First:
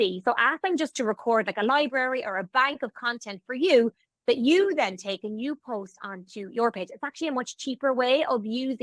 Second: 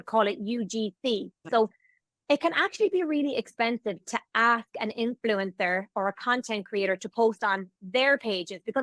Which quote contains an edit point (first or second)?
second